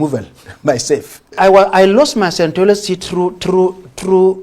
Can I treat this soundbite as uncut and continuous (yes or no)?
no